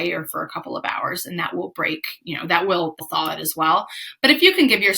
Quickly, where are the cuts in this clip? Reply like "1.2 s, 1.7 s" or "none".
3.0 s